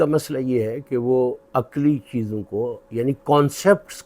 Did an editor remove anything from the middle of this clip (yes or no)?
yes